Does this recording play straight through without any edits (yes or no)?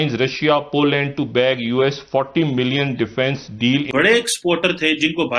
no